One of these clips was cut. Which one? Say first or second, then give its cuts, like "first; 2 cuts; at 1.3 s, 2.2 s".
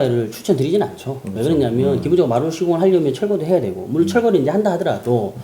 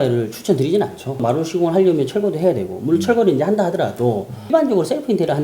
second; 2 cuts; at 1.2 s, 4.5 s